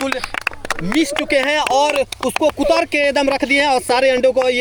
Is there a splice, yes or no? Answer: no